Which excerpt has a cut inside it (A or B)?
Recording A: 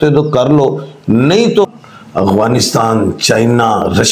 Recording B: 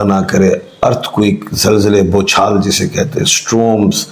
A